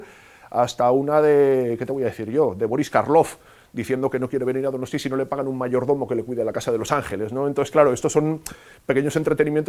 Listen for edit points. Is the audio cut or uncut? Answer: uncut